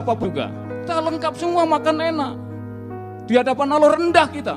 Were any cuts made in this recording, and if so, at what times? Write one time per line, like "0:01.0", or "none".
0:00.9